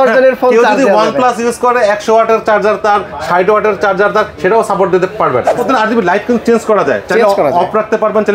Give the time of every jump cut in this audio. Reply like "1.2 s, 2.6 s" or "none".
5.5 s